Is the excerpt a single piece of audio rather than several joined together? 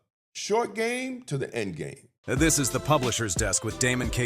no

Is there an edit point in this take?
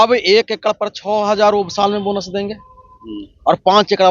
no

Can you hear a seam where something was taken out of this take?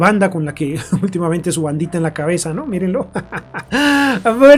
no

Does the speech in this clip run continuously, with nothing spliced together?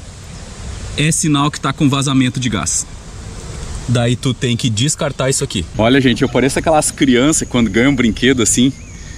no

